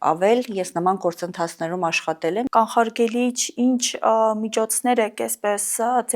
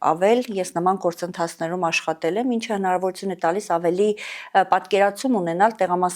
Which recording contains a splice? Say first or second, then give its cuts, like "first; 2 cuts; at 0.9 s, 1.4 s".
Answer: first; 1 cut; at 2.5 s